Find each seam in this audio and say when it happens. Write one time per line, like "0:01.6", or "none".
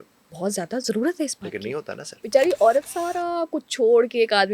0:02.1